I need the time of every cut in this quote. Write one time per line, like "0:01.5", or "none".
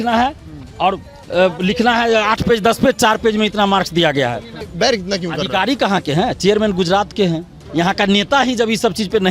0:04.6
0:07.6

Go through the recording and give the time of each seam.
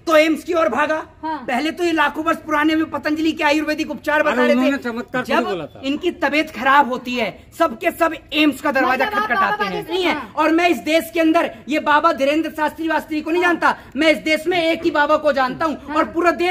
0:09.9

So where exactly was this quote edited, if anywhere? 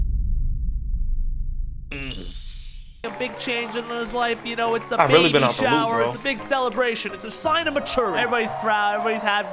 0:03.0

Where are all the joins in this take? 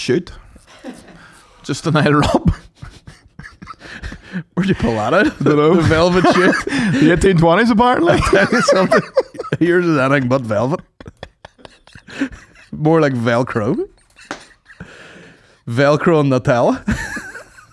none

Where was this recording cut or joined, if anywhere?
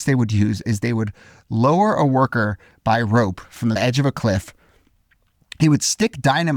0:03.8

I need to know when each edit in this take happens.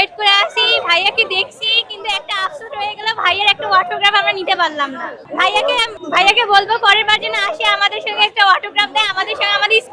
none

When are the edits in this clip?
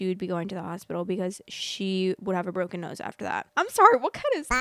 0:03.5

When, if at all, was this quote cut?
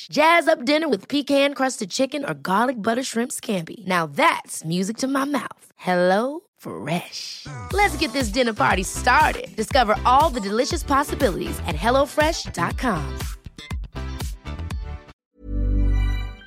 0:15.1

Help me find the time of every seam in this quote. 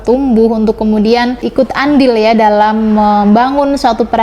0:01.4

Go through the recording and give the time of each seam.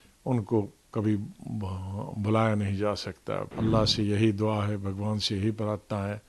0:03.5

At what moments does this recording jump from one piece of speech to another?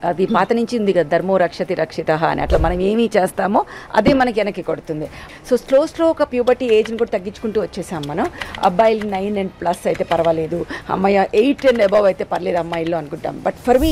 0:05.1

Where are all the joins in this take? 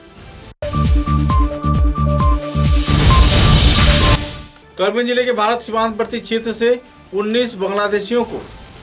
0:04.3

